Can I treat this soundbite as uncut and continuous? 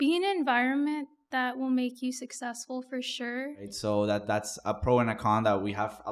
no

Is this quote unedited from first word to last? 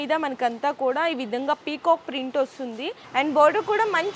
no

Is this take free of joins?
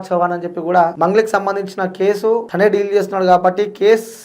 no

